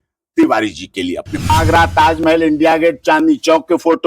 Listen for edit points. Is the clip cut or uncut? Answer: cut